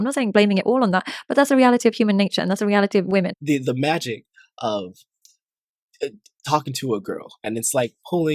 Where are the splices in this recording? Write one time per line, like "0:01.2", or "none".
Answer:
0:03.4